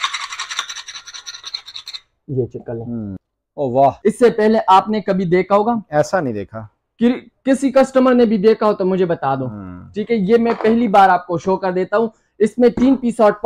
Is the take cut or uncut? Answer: cut